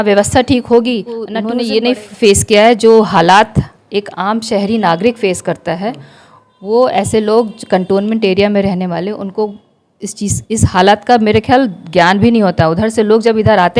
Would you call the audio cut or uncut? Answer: cut